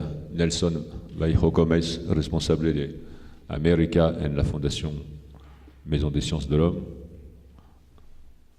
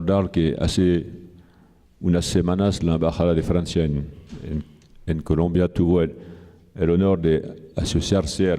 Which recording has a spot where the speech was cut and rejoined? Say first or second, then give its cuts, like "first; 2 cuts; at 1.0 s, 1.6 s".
second; 1 cut; at 5.5 s